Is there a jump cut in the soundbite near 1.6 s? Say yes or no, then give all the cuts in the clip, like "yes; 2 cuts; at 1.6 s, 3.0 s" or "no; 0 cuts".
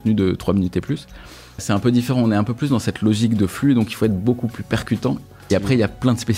yes; 2 cuts; at 1.6 s, 5.2 s